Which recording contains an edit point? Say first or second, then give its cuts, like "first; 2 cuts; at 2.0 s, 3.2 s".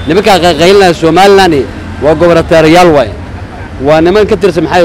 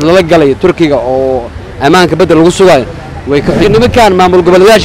second; 1 cut; at 3.6 s